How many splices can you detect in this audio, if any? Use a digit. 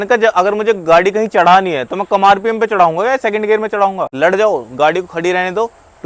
1